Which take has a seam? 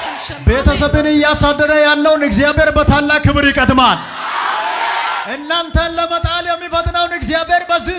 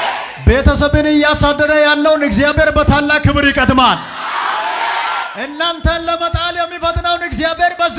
first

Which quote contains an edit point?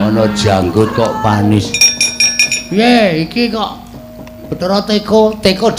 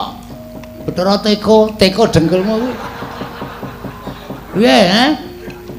first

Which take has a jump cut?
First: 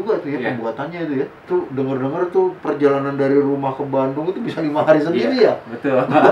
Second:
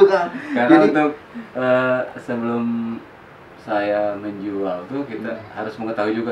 first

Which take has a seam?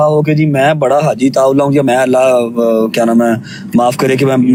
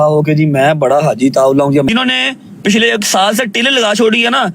second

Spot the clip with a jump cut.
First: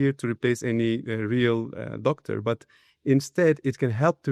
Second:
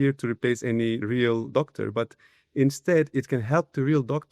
second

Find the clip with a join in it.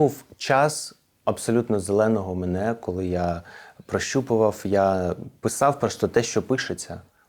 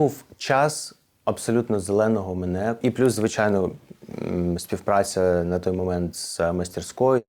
second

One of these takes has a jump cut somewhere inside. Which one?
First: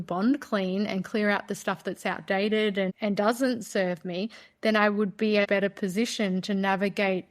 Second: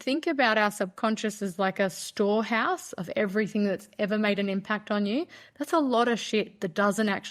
first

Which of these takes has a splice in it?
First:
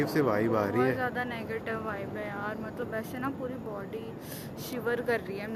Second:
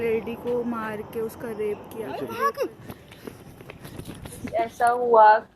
second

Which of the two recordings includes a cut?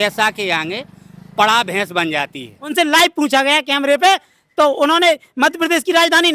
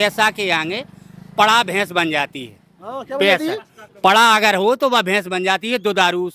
first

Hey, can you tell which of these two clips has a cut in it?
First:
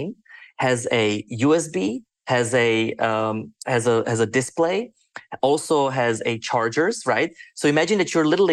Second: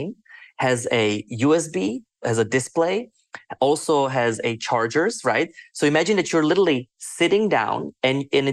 second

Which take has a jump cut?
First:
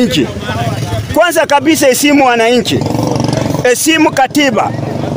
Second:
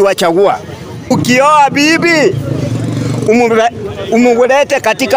second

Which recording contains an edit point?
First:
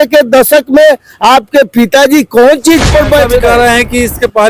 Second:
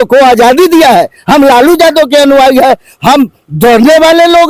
first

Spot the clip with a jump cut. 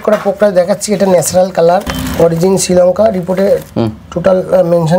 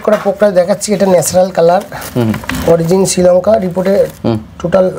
first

